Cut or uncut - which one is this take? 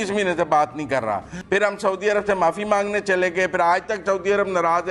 cut